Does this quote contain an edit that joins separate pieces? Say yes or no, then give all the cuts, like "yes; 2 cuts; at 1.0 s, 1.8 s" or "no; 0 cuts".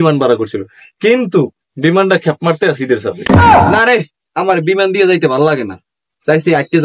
no; 0 cuts